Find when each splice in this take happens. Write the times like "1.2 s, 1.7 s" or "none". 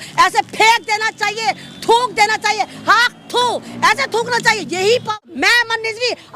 5.2 s